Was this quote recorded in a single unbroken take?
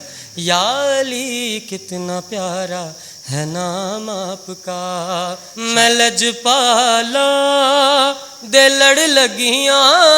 no; 1 cut; at 5.5 s

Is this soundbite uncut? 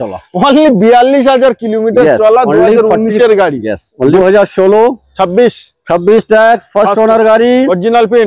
no; 1 cut; at 4.1 s

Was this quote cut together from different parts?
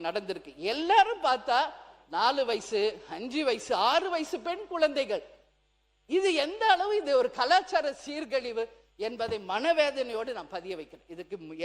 no; 0 cuts

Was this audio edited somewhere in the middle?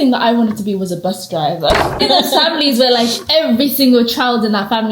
yes; 1 cut; at 2.0 s

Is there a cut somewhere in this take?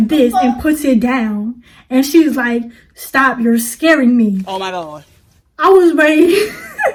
no; 0 cuts

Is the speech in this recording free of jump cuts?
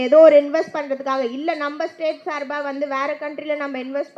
yes; 0 cuts

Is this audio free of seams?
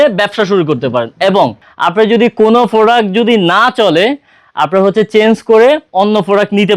no; 1 cut; at 1.7 s

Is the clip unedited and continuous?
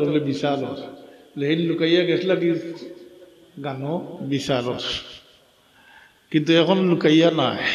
no; 1 cut; at 4.1 s

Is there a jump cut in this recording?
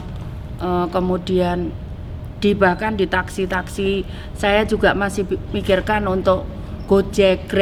no; 0 cuts

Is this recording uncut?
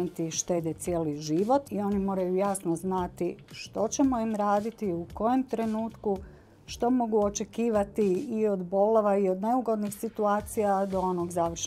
no; 1 cut; at 1.7 s

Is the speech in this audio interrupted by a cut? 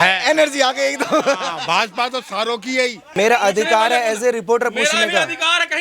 yes; 1 cut; at 3.1 s

